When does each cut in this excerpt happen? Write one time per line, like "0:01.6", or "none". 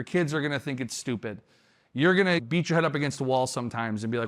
0:02.4